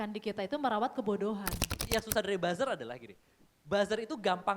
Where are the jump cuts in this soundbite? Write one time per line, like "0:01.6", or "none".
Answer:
0:01.7